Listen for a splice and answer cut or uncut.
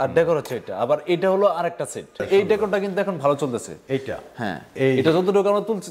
cut